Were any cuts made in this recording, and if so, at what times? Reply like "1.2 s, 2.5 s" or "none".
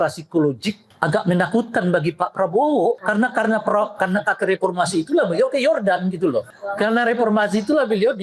0.9 s, 3.0 s, 6.5 s